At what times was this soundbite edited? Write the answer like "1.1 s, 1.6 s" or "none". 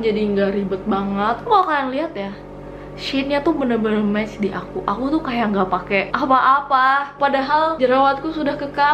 1.4 s